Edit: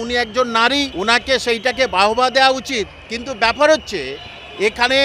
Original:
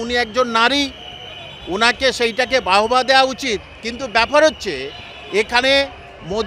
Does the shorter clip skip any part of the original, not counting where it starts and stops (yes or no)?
yes